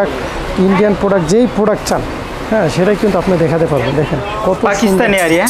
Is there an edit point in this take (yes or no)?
no